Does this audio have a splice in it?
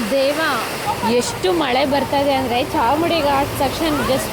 yes; 1 cut; at 0.9 s

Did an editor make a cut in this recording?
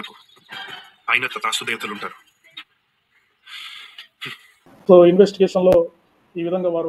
yes; 1 cut; at 4.8 s

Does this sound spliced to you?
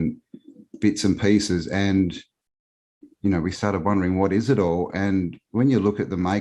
no; 0 cuts

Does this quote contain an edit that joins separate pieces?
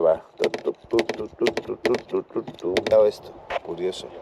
yes; 1 cut; at 2.9 s

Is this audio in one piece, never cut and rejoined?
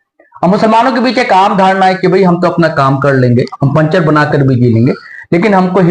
yes; 0 cuts

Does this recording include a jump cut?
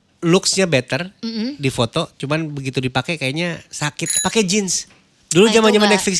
yes; 1 cut; at 4.0 s

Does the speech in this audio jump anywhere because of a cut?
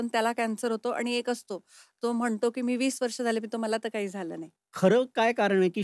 yes; 1 cut; at 4.6 s

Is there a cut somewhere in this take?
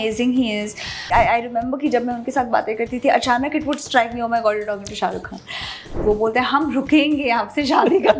yes; 2 cuts; at 1.0 s, 5.9 s

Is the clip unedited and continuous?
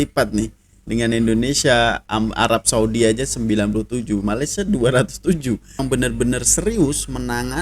no; 1 cut; at 5.8 s

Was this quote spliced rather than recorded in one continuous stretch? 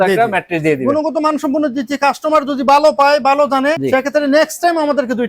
yes; 1 cut; at 3.8 s

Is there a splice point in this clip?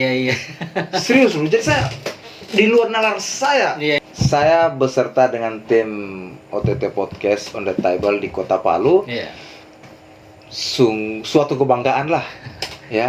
yes; 1 cut; at 4.1 s

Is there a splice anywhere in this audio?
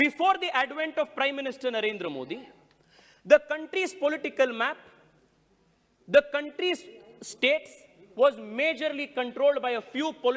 no; 0 cuts

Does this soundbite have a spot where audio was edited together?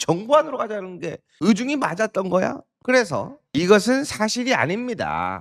no; 0 cuts

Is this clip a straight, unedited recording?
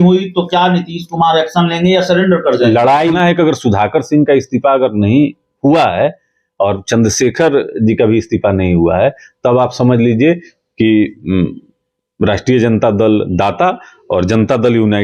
no; 1 cut; at 3.1 s

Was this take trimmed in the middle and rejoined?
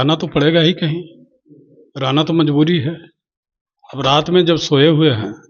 no; 0 cuts

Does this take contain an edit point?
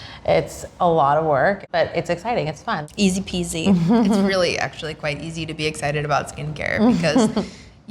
yes; 2 cuts; at 1.6 s, 2.8 s

